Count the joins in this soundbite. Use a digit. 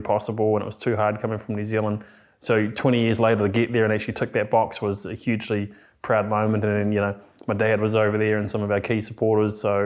0